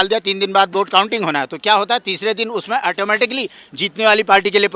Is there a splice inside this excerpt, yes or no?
no